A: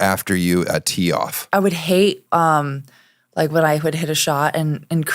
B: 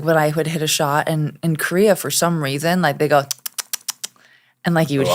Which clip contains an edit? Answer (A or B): A